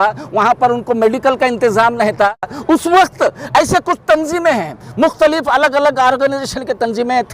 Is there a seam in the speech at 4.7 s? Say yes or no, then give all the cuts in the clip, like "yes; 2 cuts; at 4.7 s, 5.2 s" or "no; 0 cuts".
no; 1 cut; at 2.5 s